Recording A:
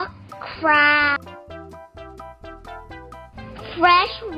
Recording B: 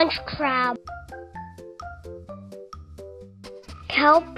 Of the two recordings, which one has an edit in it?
B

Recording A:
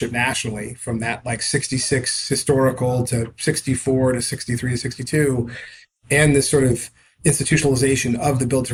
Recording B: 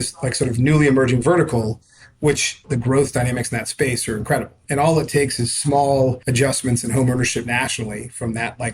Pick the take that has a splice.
B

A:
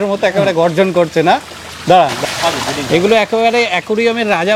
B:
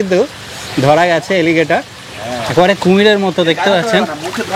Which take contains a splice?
A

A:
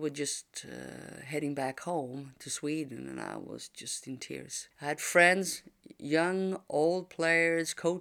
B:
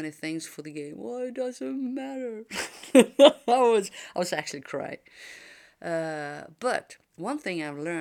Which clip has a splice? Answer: A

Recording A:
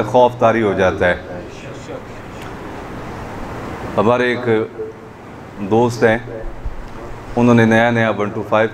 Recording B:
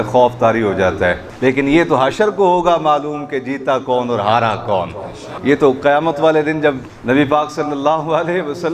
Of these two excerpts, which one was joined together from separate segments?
B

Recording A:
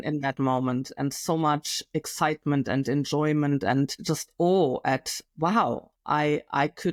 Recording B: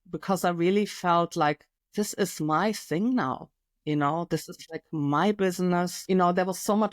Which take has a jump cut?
B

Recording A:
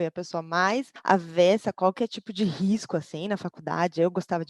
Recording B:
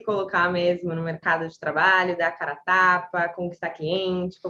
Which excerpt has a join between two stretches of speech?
A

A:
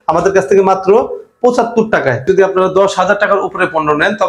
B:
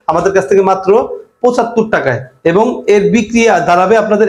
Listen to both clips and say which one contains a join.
A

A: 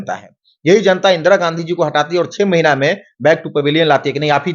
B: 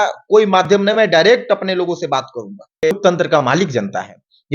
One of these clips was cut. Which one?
B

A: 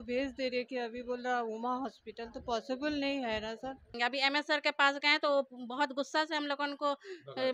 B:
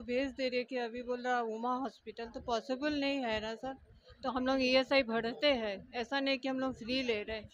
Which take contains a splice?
A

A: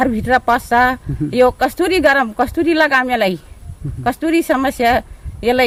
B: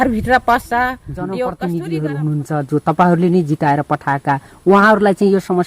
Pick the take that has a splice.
B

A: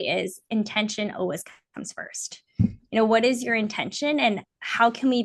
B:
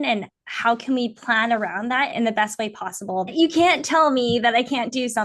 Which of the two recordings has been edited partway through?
B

